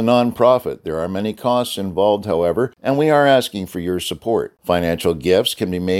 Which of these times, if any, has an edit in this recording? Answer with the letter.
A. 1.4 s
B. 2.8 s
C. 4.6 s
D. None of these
B